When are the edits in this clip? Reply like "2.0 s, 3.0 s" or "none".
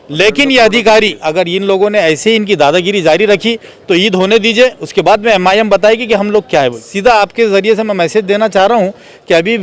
1.2 s, 6.8 s